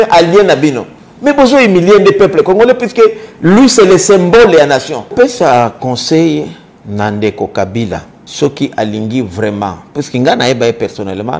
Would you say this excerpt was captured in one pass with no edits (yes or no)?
no